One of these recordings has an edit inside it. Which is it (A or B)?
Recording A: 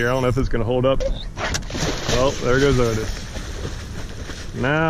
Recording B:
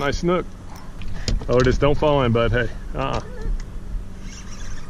A